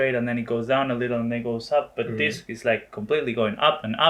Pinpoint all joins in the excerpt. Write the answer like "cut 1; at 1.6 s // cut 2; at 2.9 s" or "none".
none